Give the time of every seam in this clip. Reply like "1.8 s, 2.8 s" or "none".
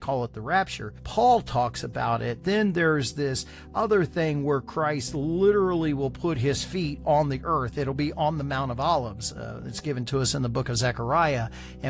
1.0 s